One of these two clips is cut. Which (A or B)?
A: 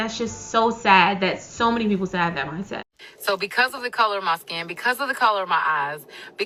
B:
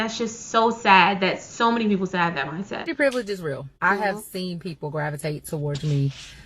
B